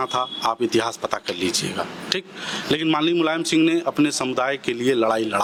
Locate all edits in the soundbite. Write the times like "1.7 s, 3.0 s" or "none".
none

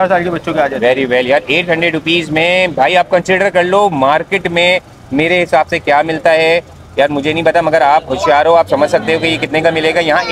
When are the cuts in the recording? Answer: none

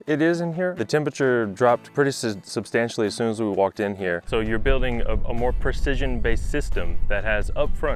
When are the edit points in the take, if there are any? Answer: 0.8 s, 1.9 s, 4.2 s

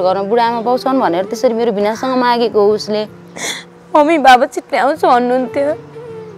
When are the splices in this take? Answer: 3.2 s

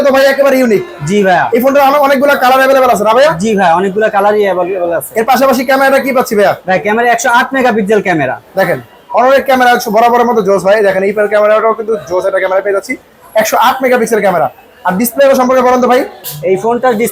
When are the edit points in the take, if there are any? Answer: none

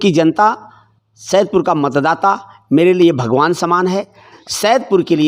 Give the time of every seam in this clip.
4.4 s

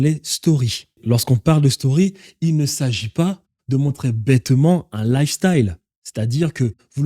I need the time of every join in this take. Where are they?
1.0 s

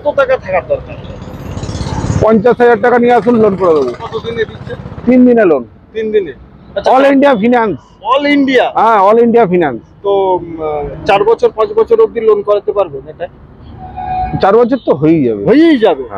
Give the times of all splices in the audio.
none

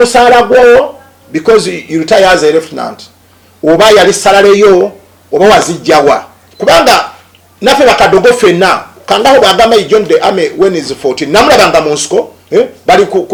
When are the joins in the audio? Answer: none

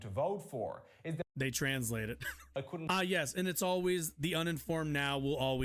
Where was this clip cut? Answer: 0.9 s, 2.3 s

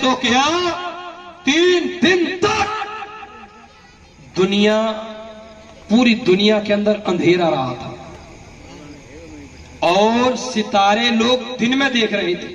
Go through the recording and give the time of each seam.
none

